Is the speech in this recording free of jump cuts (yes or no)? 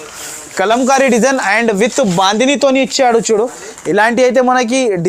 yes